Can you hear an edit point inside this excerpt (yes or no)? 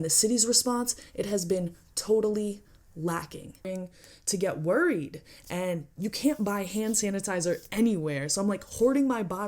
yes